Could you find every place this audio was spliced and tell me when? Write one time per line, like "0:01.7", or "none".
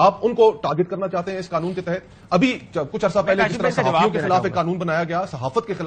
none